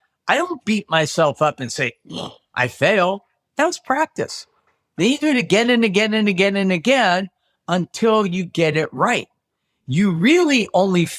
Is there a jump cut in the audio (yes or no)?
no